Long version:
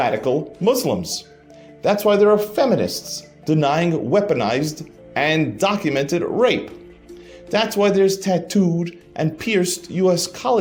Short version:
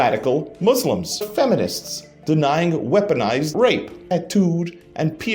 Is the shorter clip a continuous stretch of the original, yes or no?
no